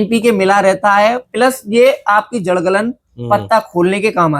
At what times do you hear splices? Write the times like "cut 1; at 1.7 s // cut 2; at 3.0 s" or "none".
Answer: none